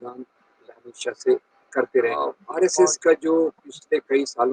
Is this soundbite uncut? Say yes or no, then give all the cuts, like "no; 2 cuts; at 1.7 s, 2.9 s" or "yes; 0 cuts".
no; 1 cut; at 2.4 s